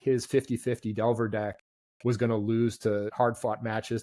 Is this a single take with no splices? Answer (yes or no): no